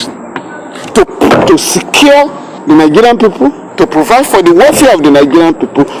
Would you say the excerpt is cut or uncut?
cut